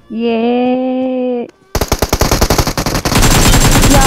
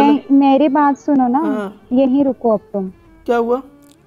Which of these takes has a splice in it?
first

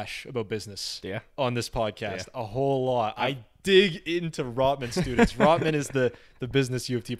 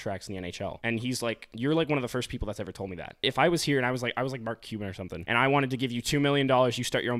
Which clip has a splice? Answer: second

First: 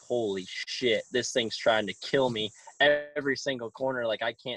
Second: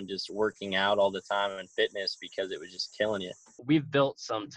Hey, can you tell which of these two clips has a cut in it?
second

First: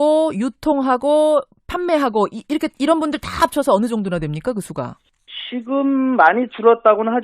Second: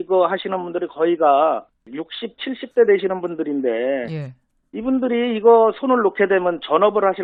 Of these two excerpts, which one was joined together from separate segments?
first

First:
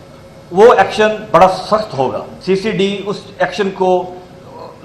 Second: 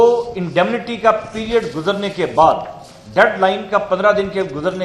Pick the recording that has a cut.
first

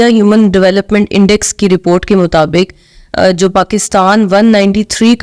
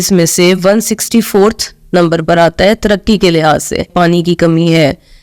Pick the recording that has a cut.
second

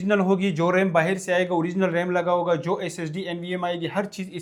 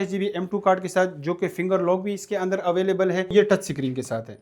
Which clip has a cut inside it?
second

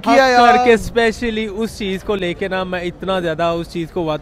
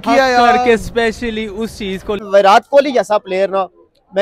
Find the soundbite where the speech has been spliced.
second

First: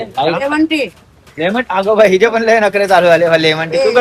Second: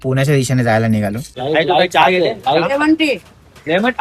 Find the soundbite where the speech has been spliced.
second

